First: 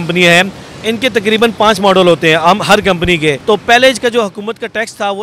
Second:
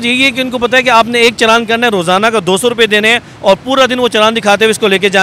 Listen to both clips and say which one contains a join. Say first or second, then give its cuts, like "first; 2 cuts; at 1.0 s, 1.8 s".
first; 1 cut; at 3.4 s